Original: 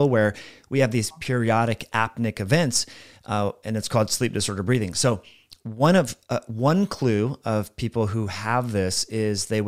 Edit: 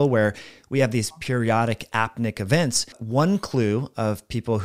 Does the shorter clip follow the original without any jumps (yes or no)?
no